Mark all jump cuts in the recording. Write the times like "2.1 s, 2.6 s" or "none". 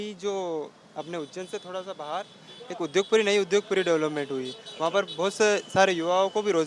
none